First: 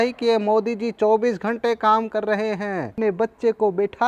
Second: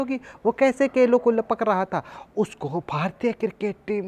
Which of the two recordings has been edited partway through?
first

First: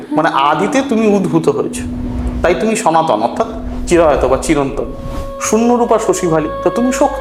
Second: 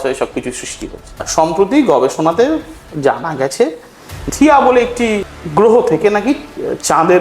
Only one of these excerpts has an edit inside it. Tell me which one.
second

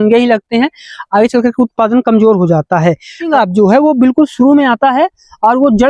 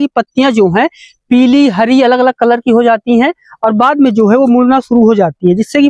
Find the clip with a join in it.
first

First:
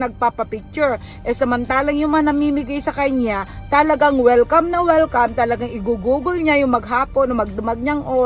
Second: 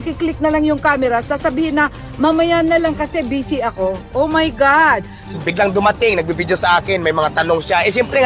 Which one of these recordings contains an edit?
second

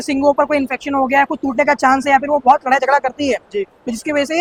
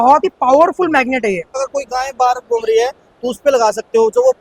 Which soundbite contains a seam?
second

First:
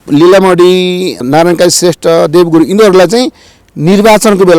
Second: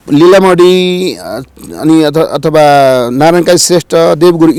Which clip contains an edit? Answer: first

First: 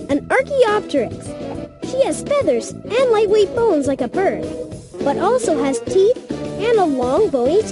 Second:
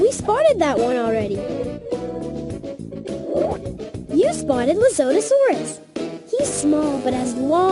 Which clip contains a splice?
second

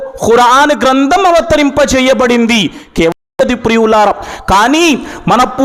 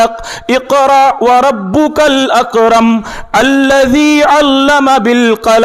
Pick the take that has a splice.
first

